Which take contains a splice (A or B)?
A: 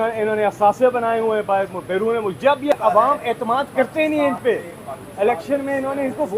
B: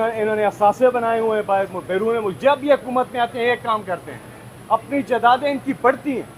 A